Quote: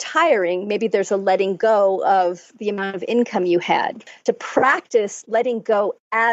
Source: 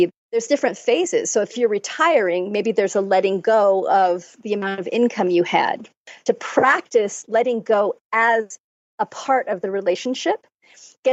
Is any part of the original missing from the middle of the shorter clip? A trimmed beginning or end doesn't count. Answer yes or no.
yes